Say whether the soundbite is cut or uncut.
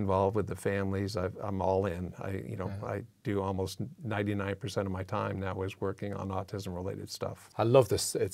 cut